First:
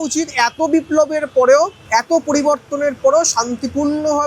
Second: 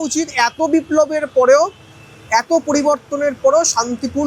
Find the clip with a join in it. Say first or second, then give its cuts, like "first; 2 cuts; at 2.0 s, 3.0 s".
first; 1 cut; at 1.8 s